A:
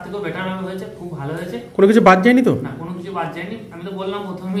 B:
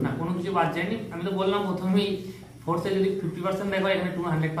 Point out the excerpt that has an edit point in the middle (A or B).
A